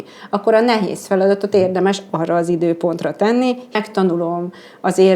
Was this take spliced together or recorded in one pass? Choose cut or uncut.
cut